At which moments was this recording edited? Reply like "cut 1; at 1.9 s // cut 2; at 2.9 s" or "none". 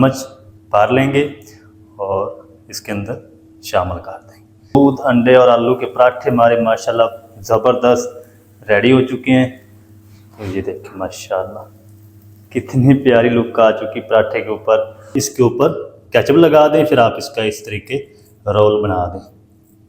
cut 1; at 4.8 s // cut 2; at 15.2 s